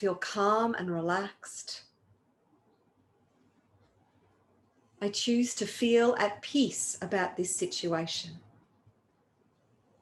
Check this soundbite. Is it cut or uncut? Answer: uncut